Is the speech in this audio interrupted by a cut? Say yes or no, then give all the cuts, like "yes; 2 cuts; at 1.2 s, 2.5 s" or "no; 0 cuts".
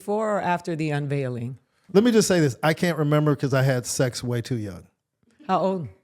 yes; 1 cut; at 1.7 s